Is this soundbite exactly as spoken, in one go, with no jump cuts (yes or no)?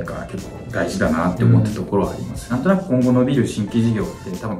no